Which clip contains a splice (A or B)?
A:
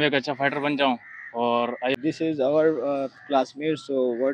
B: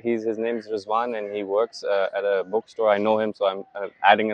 A